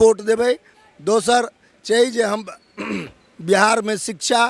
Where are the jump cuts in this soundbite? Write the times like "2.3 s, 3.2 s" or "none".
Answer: none